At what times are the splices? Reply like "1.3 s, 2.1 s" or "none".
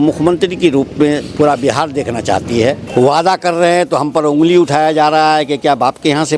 2.8 s